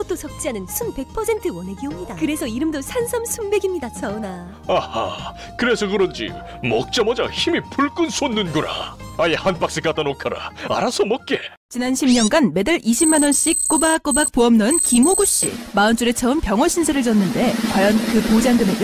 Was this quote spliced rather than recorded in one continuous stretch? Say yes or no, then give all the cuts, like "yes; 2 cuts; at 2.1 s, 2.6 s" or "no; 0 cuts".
yes; 1 cut; at 11.6 s